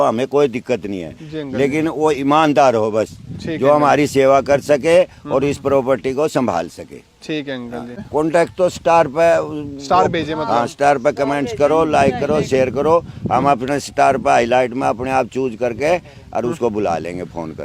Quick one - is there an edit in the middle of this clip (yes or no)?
yes